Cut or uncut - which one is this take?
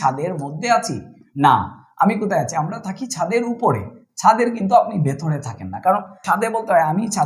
cut